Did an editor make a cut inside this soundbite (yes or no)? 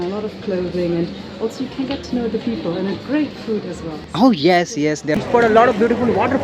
yes